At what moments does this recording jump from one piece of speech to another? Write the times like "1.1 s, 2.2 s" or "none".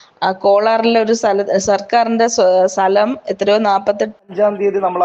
4.2 s

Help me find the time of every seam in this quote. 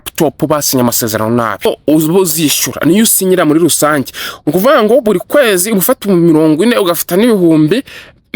1.7 s

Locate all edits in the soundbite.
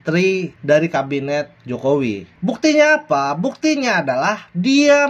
2.3 s

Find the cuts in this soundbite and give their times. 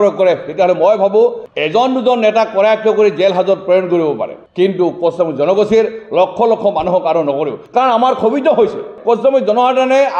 none

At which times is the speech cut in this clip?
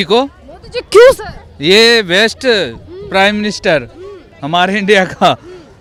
none

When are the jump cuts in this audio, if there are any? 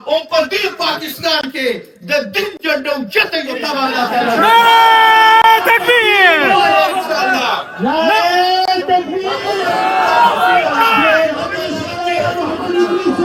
none

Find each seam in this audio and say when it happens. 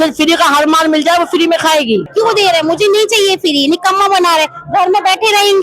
2.0 s

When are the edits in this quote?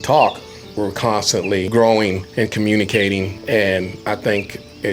1.7 s, 2.2 s, 3.4 s

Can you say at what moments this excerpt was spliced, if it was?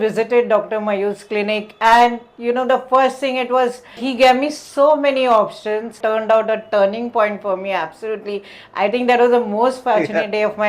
4.0 s, 6.0 s

